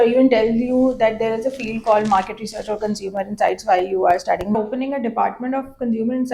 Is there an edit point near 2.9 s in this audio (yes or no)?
no